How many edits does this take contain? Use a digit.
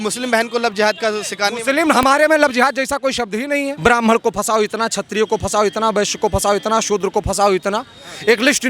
1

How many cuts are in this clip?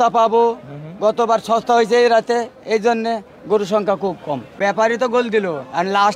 1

